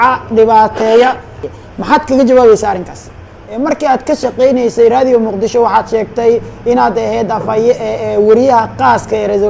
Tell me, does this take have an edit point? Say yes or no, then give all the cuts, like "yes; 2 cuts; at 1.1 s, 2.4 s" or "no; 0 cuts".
yes; 2 cuts; at 1.4 s, 3.4 s